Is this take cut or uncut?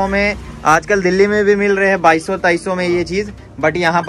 uncut